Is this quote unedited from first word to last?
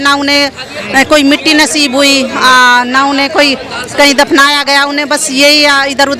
yes; 0 cuts

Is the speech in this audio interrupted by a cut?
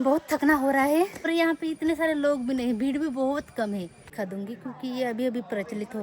yes; 2 cuts; at 1.3 s, 4.1 s

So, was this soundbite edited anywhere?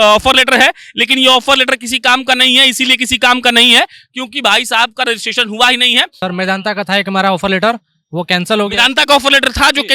yes; 1 cut; at 6.2 s

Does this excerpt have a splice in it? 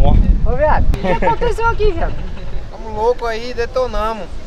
yes; 1 cut; at 0.9 s

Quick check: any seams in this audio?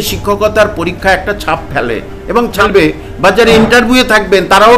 yes; 1 cut; at 2.5 s

